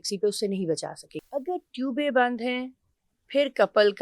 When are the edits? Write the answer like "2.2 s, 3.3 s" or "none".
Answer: 1.1 s

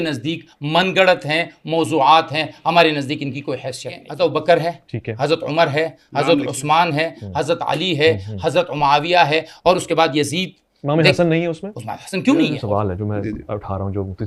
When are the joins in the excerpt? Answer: 4.0 s, 12.6 s

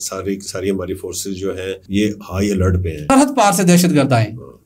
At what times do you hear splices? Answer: 1.8 s, 3.1 s

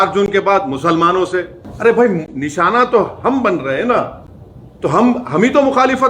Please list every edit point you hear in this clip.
none

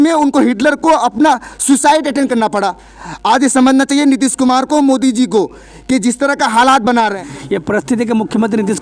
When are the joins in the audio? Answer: 7.3 s

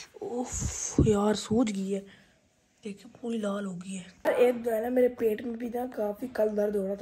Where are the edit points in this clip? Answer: 4.0 s

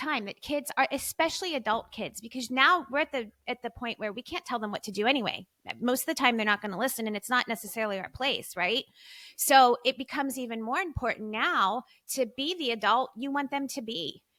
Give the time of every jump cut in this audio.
none

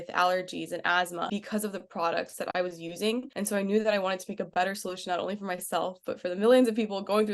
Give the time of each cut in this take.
1.3 s, 3.3 s

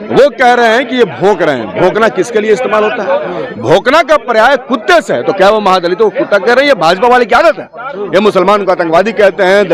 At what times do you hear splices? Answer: none

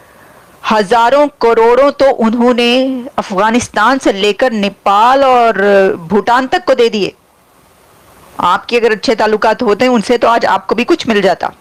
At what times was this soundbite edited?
none

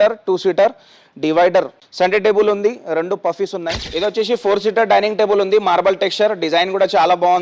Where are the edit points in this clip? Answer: 1.8 s, 3.8 s

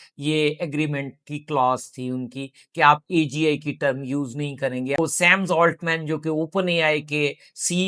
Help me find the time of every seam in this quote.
5.0 s

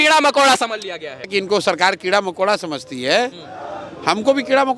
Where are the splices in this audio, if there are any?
1.3 s

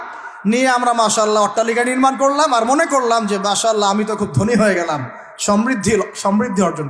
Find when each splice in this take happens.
none

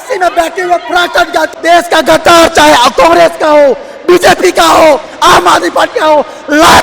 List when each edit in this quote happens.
1.5 s

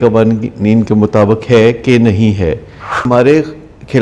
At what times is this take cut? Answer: 3.0 s

